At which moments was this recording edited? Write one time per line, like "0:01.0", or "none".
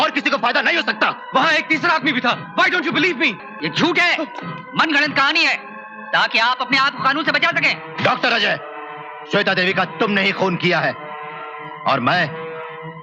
none